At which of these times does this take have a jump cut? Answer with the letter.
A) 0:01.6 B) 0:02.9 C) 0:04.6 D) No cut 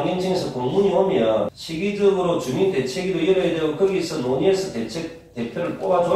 A